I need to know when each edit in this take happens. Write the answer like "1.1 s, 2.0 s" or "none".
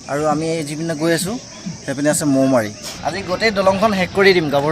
2.8 s

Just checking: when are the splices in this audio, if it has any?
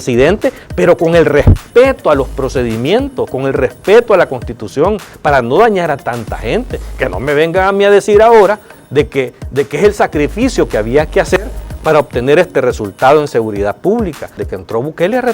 14.4 s

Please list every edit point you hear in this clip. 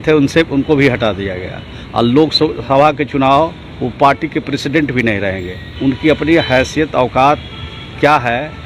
5.6 s

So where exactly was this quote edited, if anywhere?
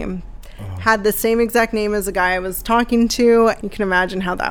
3.6 s

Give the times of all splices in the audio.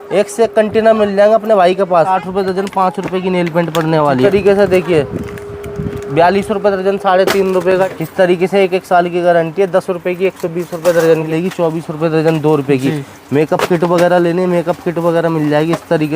2.2 s, 4.3 s, 7.9 s, 11.2 s

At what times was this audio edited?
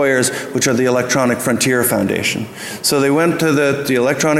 3.4 s

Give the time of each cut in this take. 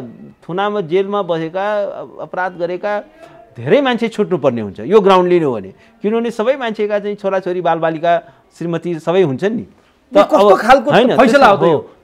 none

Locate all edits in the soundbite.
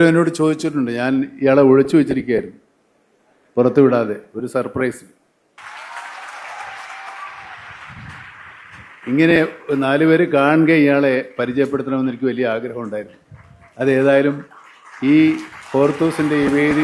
5.5 s

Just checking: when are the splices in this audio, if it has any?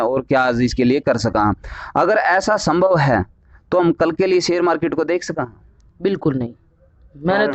none

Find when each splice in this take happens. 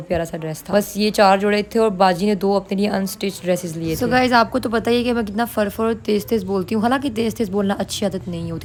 none

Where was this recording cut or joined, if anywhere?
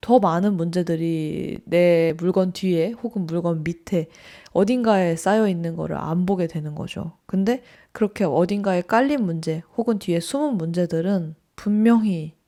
none

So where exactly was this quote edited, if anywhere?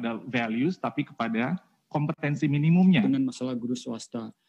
3.0 s

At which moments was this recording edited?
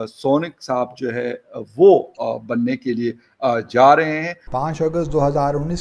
4.4 s

